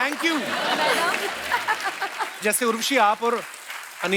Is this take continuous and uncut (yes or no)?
yes